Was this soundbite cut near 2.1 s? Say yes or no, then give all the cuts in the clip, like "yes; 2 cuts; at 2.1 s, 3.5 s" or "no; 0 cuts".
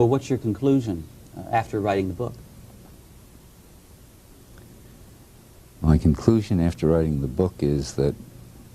no; 1 cut; at 5.6 s